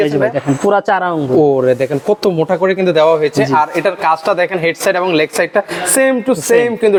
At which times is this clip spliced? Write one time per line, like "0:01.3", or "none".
none